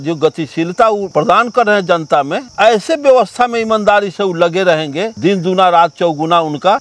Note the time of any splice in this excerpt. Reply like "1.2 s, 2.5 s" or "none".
none